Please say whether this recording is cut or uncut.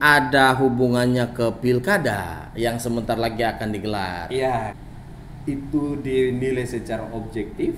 cut